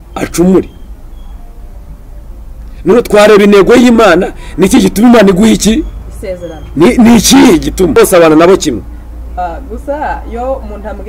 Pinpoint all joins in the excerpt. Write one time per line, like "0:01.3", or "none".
0:08.0